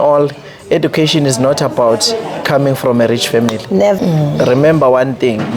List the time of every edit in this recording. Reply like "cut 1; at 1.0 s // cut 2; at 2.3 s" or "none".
cut 1; at 4.0 s